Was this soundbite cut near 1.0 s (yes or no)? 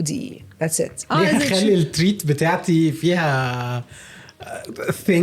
yes